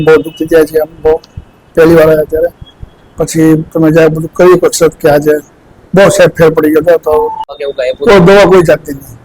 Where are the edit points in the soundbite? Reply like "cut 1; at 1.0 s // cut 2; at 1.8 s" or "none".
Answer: cut 1; at 7.6 s